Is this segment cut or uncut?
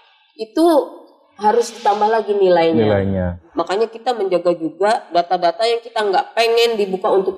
cut